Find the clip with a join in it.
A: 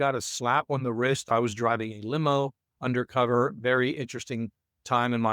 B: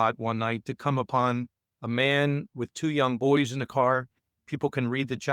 A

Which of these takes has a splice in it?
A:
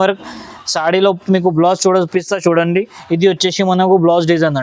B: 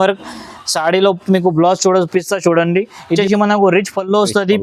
B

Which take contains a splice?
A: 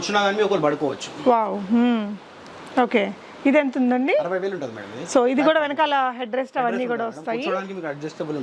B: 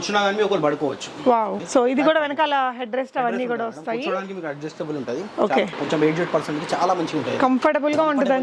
B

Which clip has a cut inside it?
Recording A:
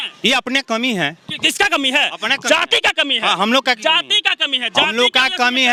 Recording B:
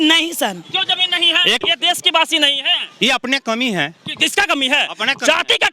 B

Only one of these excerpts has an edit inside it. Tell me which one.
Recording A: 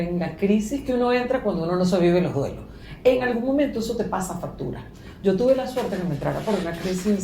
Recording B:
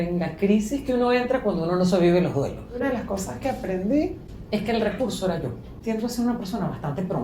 B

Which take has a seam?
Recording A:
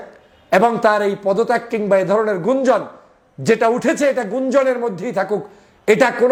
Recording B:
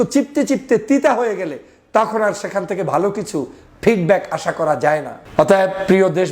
B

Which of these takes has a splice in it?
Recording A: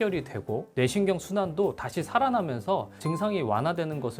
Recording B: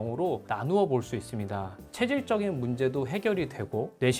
B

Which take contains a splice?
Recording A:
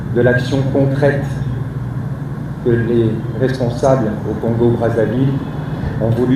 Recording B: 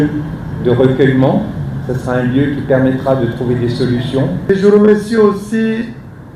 B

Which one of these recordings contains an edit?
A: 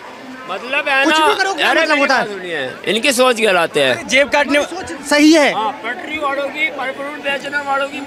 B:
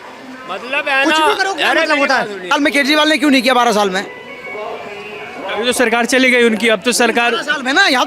B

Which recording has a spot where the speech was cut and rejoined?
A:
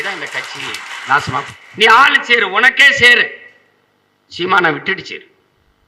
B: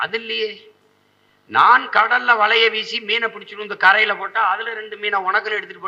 A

